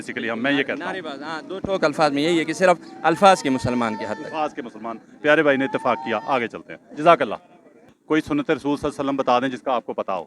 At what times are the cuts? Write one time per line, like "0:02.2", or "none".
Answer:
none